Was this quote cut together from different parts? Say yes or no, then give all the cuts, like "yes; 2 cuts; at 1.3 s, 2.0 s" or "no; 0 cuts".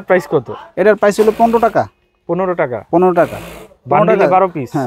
no; 0 cuts